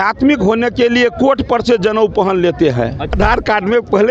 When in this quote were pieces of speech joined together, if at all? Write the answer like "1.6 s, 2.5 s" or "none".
3.1 s